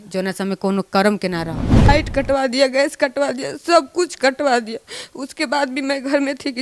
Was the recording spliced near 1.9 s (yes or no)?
yes